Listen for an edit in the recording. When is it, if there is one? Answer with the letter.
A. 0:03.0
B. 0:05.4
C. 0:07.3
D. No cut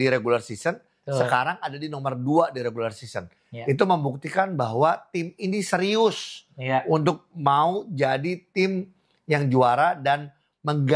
D